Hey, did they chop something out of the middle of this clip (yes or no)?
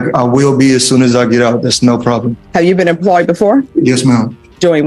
no